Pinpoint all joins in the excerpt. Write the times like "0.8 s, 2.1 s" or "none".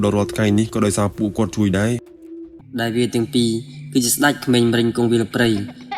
2.6 s